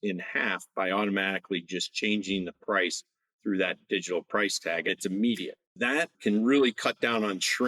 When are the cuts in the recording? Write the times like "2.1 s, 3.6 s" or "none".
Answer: 4.9 s, 6.1 s